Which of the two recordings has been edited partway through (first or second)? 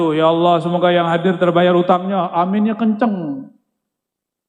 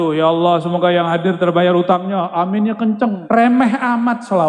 second